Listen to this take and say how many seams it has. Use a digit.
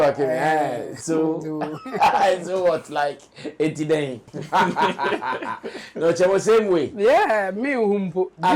1